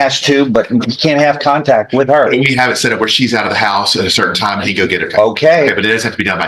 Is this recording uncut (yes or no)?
yes